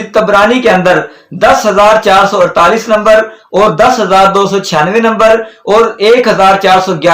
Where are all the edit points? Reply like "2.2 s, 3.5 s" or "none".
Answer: none